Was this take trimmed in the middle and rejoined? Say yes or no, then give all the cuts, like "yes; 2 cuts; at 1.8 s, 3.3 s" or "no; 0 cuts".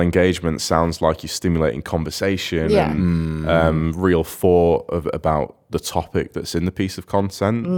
no; 0 cuts